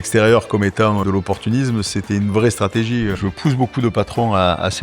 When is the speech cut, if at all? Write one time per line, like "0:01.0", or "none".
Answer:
0:01.0
0:03.2